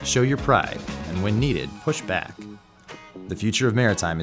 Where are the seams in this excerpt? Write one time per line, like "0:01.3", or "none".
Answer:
0:02.3